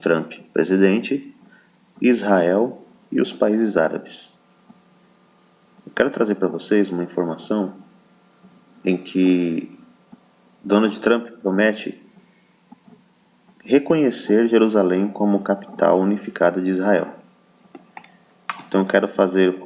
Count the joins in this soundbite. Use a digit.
0